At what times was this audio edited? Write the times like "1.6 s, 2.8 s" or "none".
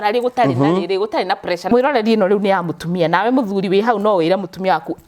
1.7 s